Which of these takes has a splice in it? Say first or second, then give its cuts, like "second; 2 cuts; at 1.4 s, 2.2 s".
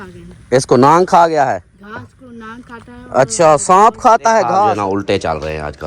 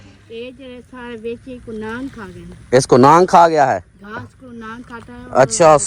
first; 1 cut; at 4.8 s